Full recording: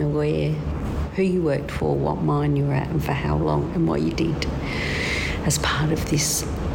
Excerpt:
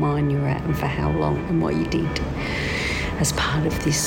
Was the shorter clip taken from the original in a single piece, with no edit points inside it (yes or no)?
yes